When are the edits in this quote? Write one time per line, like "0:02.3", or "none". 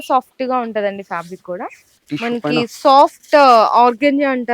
0:02.0

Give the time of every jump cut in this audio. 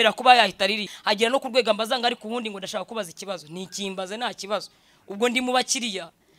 0:00.9

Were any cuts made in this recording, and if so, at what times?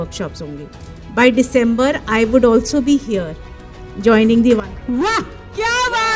none

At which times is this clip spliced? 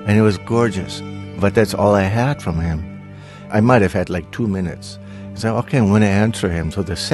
0:03.4
0:05.0

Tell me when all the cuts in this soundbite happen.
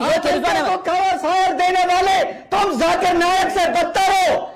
none

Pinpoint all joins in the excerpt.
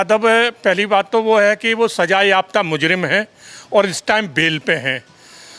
none

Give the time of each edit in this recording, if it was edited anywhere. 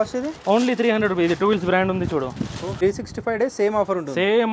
0:02.8

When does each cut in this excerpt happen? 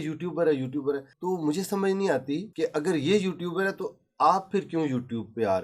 0:01.1
0:02.5

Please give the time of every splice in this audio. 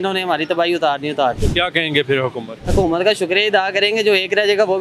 0:01.4
0:02.5

